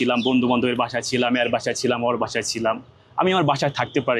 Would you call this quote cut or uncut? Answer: uncut